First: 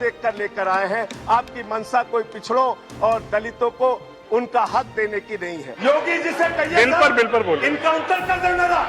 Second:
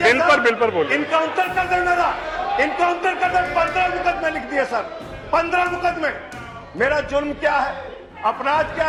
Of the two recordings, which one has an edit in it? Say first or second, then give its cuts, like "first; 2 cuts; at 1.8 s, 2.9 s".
first; 1 cut; at 5.6 s